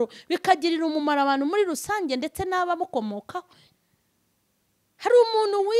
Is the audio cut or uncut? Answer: cut